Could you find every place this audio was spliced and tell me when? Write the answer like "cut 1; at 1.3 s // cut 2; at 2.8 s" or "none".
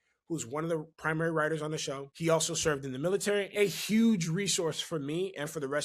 cut 1; at 2.0 s // cut 2; at 3.5 s

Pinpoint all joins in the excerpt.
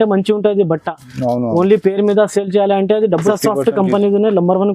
cut 1; at 3.2 s

